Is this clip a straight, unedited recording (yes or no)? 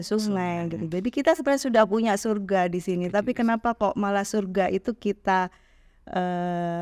yes